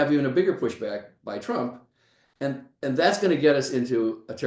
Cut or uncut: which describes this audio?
uncut